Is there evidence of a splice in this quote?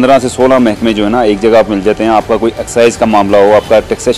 no; 0 cuts

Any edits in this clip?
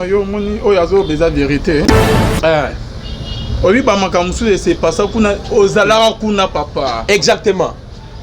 yes; 1 cut; at 2.2 s

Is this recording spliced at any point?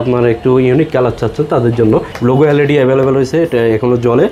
yes; 1 cut; at 2.1 s

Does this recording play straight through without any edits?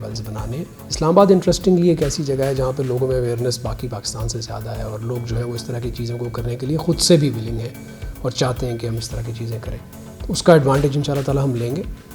yes; 0 cuts

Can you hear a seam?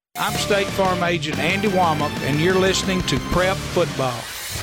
no; 0 cuts

